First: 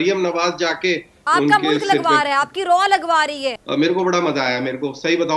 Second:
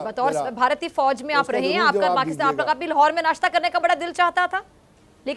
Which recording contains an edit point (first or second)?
first